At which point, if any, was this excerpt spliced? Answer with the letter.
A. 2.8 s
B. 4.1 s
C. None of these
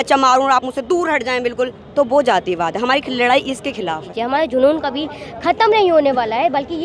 B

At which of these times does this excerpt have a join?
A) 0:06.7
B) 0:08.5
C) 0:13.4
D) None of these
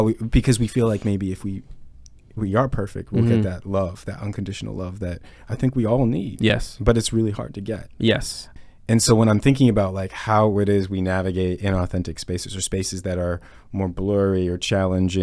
B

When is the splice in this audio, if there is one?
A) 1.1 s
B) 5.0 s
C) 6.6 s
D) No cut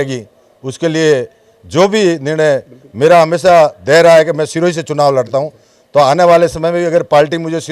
D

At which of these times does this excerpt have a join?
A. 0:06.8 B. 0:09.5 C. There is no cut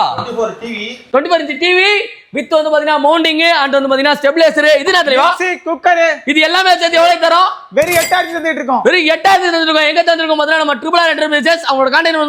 C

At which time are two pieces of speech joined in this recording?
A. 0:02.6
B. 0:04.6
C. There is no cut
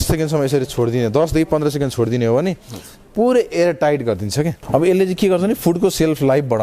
B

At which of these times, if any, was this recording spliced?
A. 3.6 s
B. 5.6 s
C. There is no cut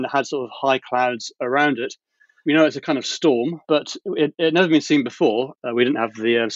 B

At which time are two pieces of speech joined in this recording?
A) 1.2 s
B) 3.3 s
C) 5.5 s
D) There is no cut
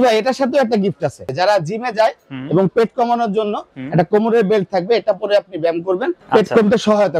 A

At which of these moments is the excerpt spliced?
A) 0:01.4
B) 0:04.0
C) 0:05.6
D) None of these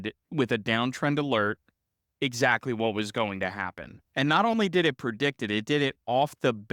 B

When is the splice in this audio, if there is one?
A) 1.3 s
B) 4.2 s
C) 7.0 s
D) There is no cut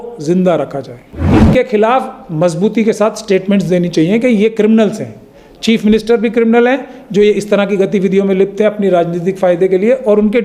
A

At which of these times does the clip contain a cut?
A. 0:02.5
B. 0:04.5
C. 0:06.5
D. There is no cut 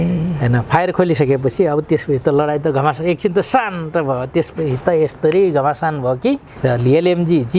C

